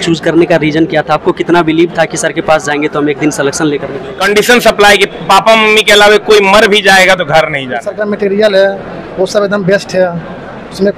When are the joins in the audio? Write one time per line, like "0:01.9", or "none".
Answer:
0:04.1
0:07.9